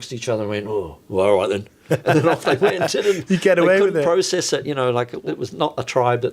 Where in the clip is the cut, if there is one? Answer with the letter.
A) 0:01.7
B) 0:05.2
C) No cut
B